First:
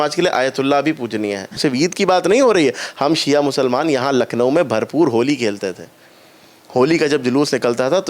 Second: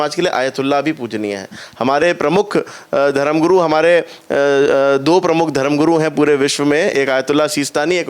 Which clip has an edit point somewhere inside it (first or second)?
first